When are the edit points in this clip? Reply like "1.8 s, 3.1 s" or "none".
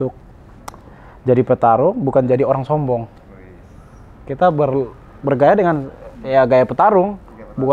none